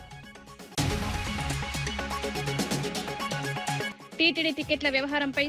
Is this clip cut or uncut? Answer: cut